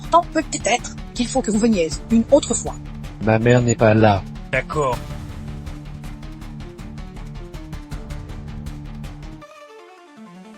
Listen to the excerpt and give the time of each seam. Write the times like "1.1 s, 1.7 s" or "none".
5.0 s